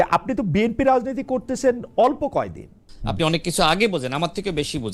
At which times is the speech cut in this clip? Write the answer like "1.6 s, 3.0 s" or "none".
2.9 s